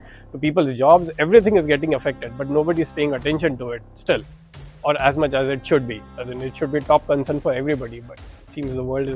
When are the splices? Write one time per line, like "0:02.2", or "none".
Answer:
none